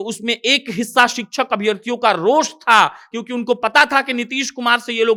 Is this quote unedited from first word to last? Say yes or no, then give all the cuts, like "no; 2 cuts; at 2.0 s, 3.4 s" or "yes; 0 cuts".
yes; 0 cuts